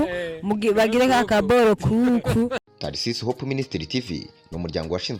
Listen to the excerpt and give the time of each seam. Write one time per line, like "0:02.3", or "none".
0:02.7